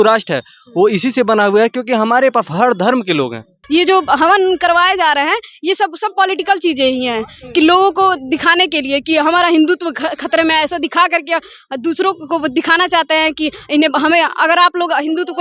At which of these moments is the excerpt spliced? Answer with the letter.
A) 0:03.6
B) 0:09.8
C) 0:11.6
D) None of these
A